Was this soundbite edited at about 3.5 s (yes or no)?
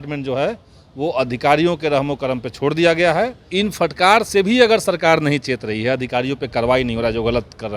yes